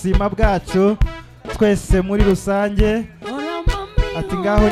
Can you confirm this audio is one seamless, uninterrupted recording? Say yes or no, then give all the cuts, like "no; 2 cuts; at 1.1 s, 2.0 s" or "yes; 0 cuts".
yes; 0 cuts